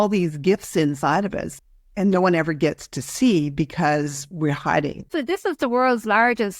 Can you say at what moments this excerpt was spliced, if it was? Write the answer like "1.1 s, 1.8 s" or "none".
1.4 s, 5.0 s